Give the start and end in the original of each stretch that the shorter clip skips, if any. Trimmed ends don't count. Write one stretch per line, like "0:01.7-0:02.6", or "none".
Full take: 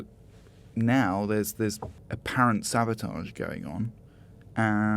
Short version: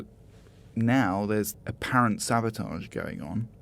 0:01.5-0:02.0

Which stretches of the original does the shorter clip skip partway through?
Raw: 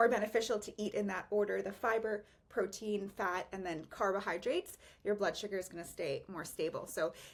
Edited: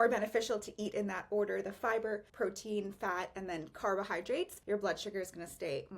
0:02.3-0:02.4
0:04.7-0:04.9

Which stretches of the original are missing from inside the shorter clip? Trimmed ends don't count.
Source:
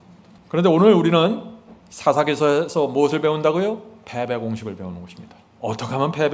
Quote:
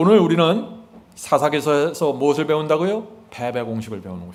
none

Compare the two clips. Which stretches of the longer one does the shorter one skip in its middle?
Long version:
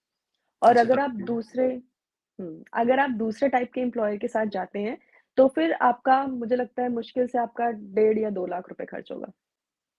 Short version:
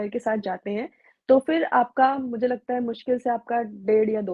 none

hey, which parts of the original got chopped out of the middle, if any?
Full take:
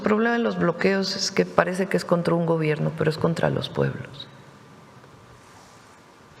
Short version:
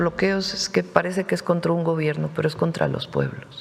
none

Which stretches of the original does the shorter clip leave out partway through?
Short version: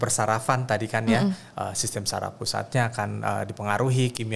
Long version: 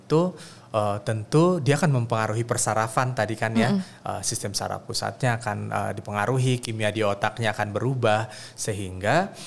none

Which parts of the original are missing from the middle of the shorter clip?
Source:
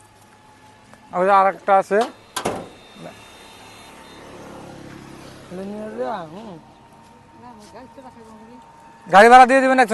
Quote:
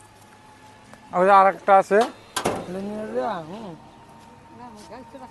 0:02.7-0:05.5

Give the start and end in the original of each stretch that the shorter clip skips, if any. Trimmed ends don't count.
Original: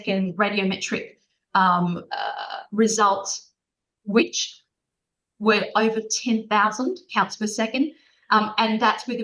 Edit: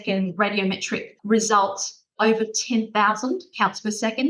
0:01.1-0:02.6
0:03.6-0:05.7

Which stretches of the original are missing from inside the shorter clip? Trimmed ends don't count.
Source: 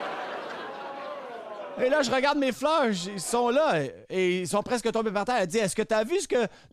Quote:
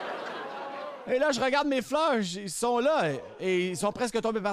0:01.3-0:01.7

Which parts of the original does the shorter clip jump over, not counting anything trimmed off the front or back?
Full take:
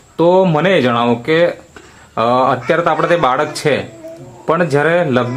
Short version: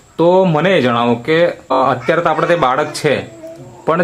0:01.8-0:02.4

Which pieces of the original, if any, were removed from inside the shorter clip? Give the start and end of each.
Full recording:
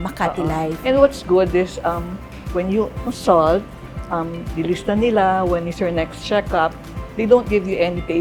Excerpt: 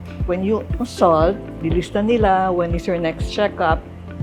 0:03.8-0:04.4

